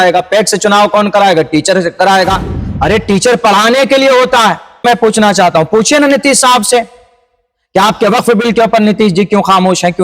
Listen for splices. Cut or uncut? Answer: cut